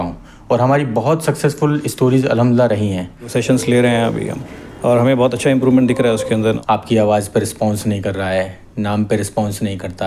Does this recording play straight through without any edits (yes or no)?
no